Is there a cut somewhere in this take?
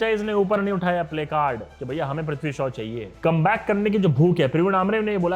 yes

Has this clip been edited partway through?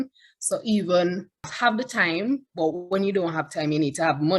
yes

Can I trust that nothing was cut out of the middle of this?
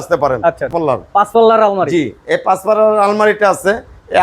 no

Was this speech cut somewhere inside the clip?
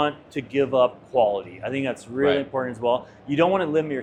no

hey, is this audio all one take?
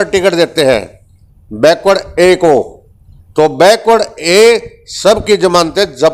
yes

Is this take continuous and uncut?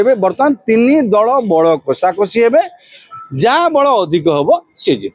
yes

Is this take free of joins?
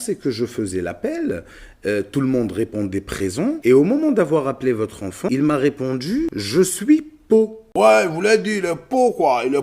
no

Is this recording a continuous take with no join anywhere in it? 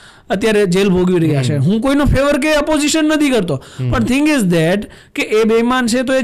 yes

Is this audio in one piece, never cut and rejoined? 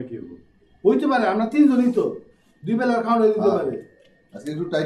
yes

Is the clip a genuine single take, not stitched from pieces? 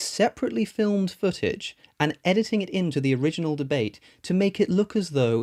yes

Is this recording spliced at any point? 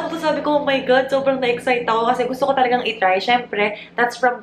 no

